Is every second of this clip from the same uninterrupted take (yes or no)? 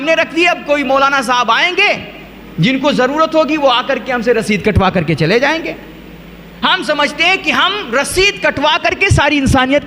yes